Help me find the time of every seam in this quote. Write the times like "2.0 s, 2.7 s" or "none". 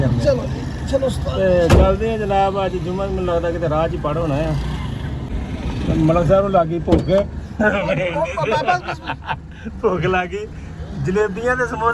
5.3 s